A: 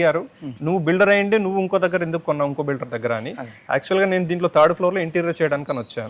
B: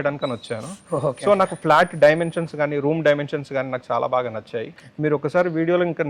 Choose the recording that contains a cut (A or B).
B